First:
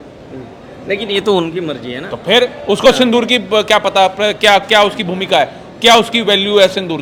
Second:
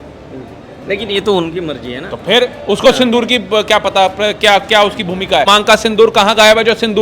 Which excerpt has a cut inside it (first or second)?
second